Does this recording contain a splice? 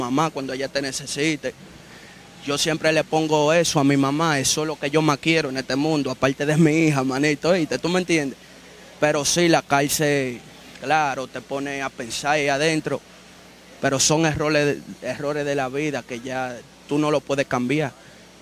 no; 0 cuts

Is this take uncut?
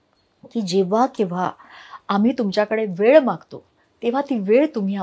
yes; 0 cuts

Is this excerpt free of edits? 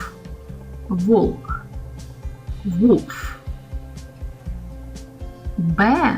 no; 2 cuts; at 3.2 s, 5.1 s

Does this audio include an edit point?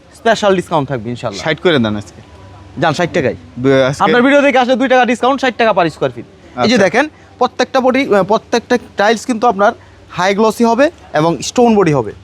no; 0 cuts

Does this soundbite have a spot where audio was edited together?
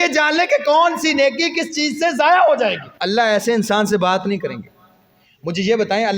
yes; 1 cut; at 2.9 s

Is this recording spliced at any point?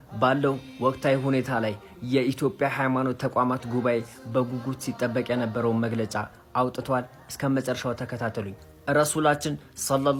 no; 0 cuts

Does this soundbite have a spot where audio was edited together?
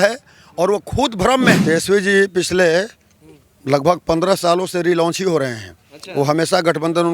yes; 1 cut; at 1.6 s

